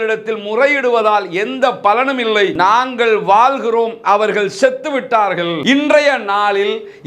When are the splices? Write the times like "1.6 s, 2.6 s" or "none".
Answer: 2.5 s, 5.6 s